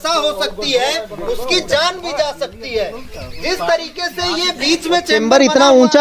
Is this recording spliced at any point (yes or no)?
yes